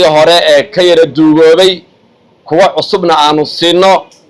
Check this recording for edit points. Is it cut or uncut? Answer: uncut